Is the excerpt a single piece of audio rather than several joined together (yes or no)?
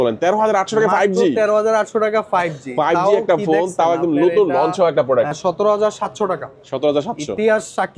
no